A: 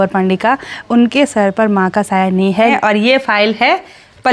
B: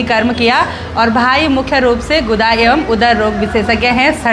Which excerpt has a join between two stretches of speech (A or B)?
A